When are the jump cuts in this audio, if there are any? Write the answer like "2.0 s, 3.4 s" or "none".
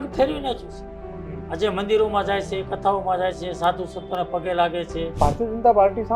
5.1 s